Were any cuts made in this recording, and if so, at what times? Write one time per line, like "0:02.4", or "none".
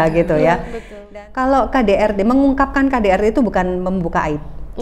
0:00.9